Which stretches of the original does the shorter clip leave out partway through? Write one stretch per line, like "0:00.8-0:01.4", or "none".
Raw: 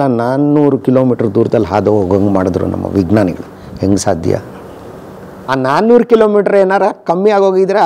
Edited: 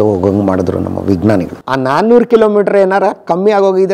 0:03.5-0:05.4